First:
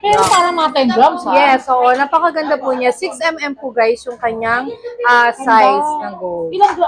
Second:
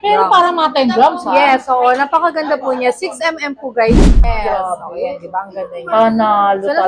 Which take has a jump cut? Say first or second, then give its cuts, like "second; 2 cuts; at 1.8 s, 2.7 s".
second; 1 cut; at 4.2 s